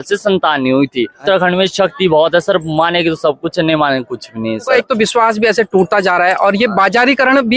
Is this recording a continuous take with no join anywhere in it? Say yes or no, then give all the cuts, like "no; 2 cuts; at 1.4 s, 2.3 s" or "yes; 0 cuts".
no; 2 cuts; at 1.2 s, 4.7 s